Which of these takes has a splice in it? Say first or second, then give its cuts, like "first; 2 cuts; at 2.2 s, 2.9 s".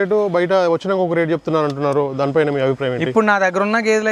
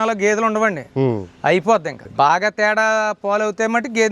second; 1 cut; at 2.1 s